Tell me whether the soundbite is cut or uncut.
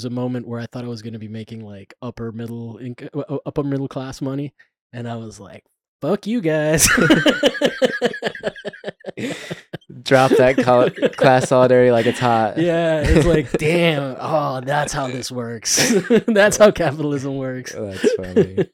uncut